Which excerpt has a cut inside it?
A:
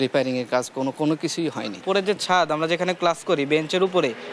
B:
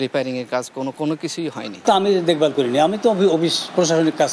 A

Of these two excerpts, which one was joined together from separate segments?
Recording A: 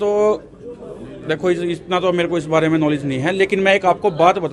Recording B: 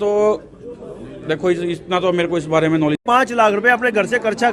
B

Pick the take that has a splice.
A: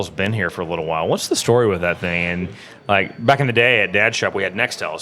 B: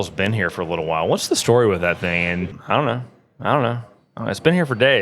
B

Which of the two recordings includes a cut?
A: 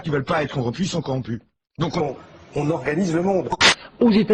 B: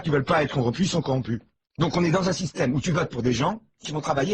B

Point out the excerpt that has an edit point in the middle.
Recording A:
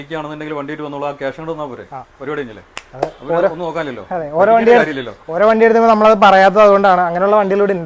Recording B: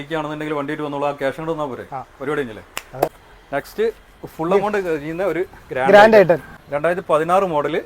B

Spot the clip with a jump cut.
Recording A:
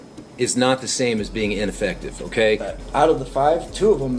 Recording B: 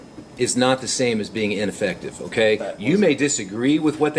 A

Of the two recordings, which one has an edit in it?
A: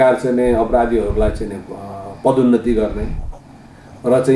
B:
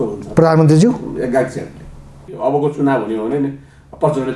B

